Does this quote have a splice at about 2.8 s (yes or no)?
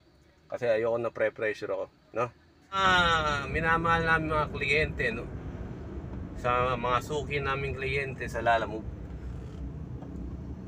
yes